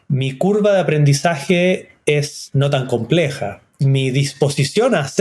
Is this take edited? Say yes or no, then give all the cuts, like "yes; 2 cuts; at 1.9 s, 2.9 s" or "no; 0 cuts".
yes; 2 cuts; at 2.4 s, 3.6 s